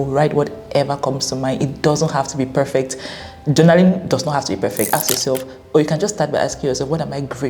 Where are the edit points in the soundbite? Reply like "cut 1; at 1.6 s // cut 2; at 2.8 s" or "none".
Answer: cut 1; at 4.9 s

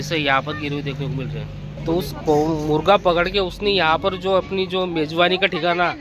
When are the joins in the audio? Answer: cut 1; at 1.8 s

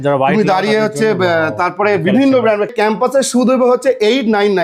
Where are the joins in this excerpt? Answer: cut 1; at 2.7 s

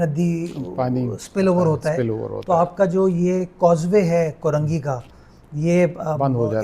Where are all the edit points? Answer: none

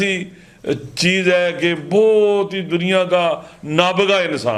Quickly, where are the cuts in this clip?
none

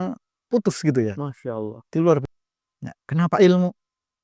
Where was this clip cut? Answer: cut 1; at 2.2 s

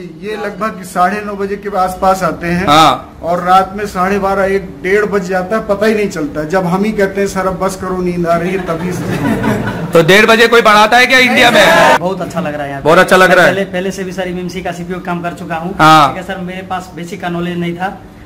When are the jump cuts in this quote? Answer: cut 1; at 12.0 s

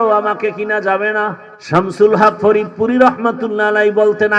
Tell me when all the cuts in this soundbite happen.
cut 1; at 1.5 s

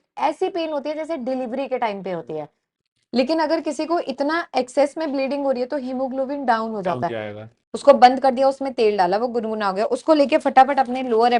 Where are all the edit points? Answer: cut 1; at 2.8 s // cut 2; at 7.5 s

